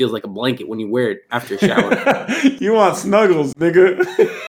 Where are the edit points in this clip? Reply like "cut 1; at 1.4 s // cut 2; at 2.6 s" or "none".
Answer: cut 1; at 2.6 s